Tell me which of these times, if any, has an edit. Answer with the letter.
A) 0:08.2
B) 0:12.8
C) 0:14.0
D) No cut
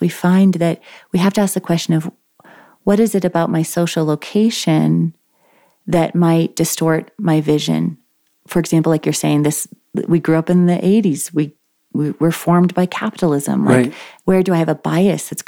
C